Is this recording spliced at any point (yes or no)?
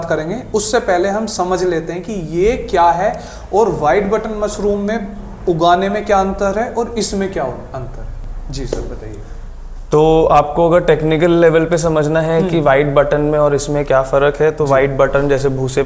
no